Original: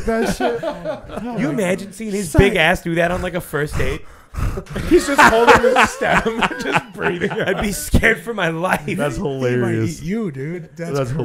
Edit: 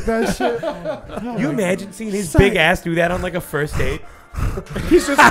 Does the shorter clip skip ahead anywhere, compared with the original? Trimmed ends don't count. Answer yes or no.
no